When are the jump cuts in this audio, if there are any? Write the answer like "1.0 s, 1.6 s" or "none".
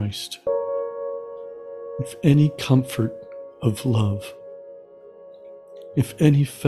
4.1 s, 5.8 s